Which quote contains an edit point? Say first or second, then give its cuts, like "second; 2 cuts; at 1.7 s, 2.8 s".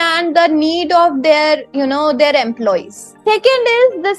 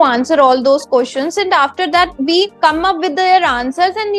first; 1 cut; at 3.1 s